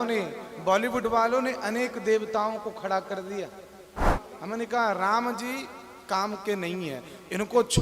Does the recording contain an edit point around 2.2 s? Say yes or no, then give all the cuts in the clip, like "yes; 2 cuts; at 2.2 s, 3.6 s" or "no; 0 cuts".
no; 1 cut; at 4.2 s